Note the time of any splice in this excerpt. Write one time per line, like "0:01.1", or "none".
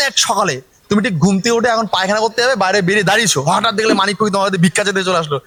none